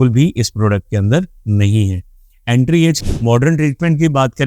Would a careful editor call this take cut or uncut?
cut